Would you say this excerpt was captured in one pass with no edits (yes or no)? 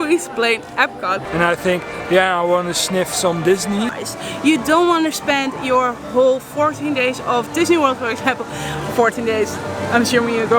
no